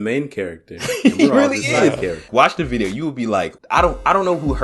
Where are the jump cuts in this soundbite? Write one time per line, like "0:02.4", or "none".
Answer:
0:02.3
0:03.6